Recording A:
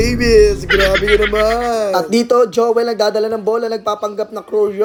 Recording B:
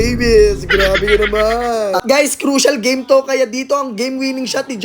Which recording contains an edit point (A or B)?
B